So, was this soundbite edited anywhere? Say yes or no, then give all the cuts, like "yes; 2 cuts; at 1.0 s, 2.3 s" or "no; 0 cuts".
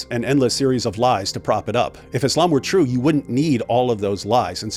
no; 0 cuts